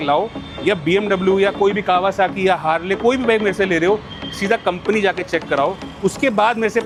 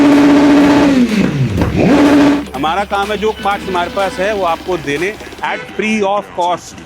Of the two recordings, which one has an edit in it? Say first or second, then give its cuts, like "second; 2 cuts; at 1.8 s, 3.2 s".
second; 1 cut; at 2.4 s